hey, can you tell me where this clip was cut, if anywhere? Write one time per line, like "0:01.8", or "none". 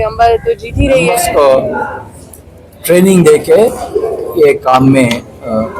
0:01.2